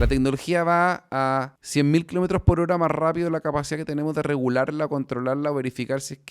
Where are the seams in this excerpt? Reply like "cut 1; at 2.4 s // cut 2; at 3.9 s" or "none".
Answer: cut 1; at 1.6 s